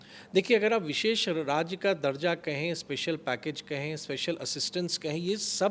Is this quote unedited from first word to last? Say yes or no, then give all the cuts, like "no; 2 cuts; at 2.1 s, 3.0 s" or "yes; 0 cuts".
yes; 0 cuts